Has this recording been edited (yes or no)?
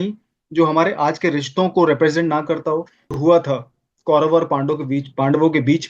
yes